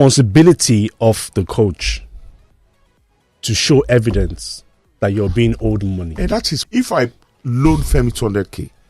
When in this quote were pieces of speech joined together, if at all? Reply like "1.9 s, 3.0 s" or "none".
6.6 s